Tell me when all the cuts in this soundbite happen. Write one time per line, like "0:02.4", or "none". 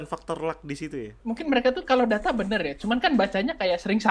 0:01.1